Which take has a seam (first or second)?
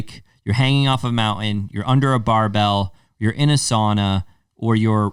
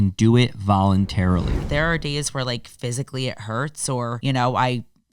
second